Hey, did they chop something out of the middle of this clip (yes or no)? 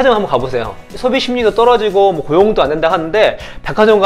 yes